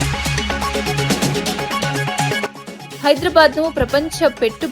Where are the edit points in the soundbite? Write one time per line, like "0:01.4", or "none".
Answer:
0:02.6